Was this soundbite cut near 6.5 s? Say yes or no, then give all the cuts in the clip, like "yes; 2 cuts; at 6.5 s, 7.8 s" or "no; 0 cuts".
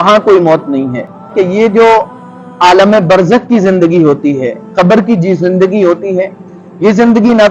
no; 1 cut; at 1.3 s